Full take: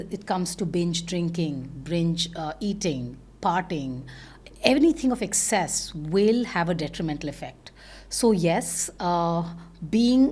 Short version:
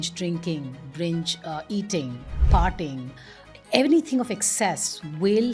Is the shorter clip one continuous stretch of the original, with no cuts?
yes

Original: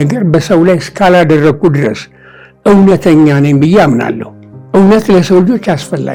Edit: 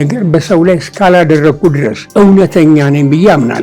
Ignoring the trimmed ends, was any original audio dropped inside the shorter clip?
yes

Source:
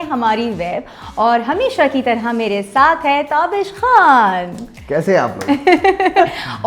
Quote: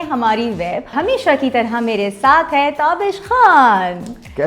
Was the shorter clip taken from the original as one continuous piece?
no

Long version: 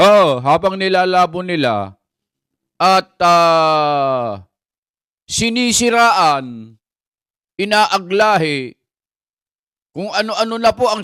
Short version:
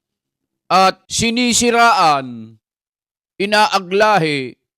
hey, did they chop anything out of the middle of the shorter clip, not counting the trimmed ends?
yes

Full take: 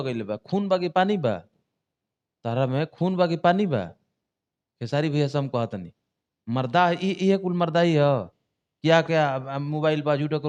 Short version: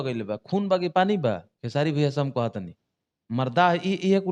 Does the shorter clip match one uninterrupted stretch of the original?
no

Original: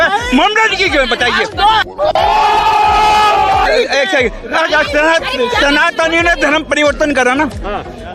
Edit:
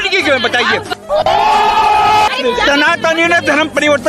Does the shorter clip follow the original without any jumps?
no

